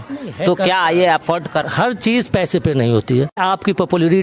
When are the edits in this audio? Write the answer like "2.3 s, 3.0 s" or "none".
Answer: 1.7 s, 3.4 s